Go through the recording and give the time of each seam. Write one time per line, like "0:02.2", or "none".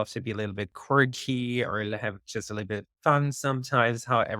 none

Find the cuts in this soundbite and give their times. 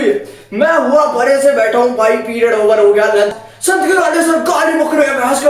0:03.3

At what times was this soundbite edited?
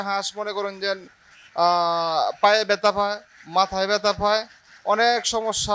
none

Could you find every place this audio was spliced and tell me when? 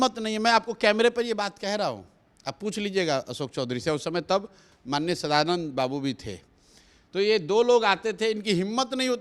none

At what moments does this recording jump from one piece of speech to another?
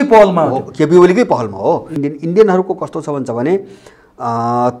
0:01.9

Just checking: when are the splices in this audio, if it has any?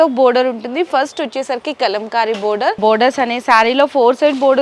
0:02.8

